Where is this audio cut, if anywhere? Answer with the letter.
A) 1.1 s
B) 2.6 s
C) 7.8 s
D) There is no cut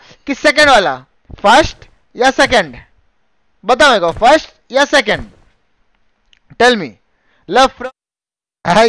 C